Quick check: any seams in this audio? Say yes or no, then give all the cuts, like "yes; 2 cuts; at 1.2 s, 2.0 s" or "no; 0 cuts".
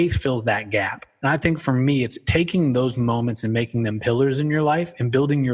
yes; 2 cuts; at 1.0 s, 2.2 s